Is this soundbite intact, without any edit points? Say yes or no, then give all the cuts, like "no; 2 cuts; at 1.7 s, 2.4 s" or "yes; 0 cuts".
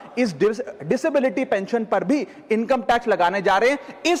yes; 0 cuts